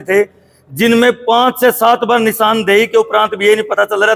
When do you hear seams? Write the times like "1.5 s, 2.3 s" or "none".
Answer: none